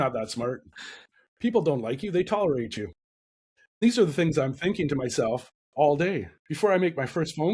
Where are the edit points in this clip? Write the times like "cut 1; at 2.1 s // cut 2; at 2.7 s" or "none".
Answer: cut 1; at 3.8 s // cut 2; at 6.4 s